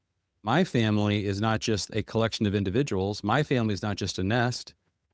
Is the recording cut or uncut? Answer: uncut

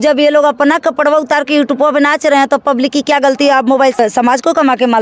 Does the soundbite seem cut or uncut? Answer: cut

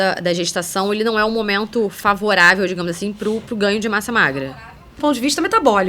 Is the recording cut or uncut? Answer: cut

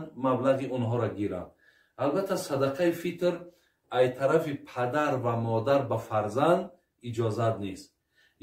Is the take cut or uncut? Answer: uncut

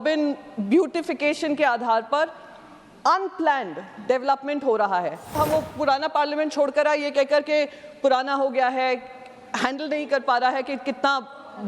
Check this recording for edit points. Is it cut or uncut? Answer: cut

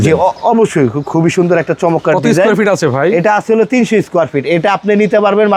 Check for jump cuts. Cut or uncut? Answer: uncut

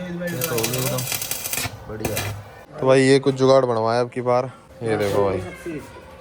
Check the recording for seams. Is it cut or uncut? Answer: cut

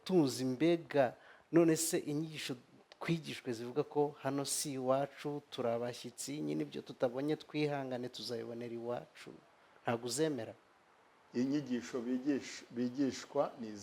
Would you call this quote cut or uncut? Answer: cut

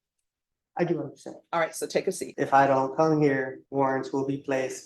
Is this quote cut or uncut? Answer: cut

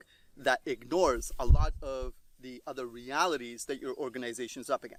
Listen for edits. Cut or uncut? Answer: uncut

